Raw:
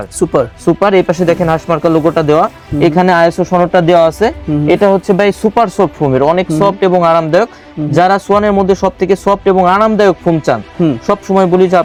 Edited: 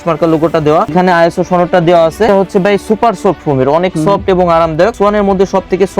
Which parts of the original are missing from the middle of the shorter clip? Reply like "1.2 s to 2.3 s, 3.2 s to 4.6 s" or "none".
2.5 s to 2.9 s, 4.3 s to 4.8 s, 7.5 s to 8.2 s